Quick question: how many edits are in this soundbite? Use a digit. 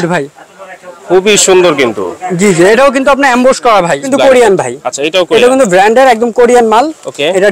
1